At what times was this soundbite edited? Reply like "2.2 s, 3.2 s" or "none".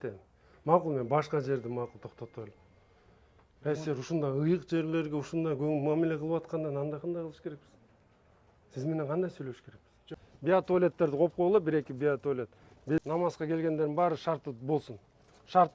10.2 s, 13.0 s